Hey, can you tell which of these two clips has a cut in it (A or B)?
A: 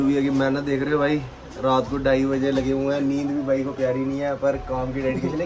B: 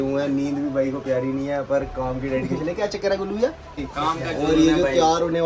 B